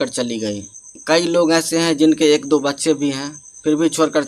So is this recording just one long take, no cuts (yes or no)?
yes